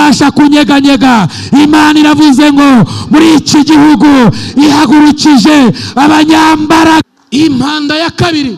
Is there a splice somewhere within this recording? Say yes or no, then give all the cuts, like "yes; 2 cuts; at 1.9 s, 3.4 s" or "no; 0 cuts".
yes; 1 cut; at 7.0 s